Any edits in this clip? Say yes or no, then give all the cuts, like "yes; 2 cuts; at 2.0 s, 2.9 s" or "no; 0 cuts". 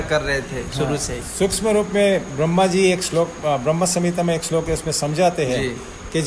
no; 0 cuts